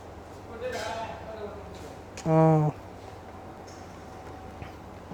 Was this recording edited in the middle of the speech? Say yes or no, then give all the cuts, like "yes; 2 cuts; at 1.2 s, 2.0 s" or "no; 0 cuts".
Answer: no; 0 cuts